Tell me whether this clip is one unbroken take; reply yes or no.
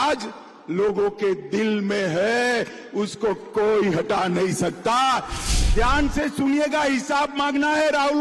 no